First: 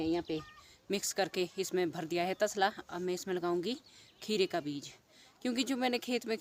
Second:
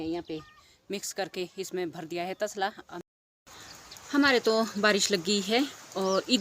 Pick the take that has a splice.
second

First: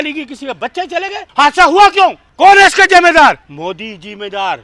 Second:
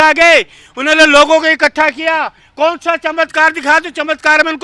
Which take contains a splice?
first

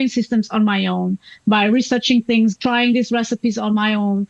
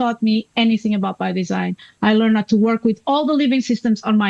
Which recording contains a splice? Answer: first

